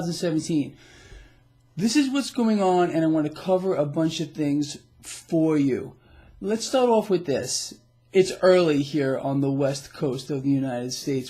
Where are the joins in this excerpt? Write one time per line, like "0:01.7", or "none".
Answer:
0:10.1